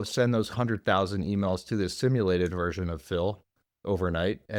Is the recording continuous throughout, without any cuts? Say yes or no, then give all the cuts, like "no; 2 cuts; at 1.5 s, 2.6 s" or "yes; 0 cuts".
yes; 0 cuts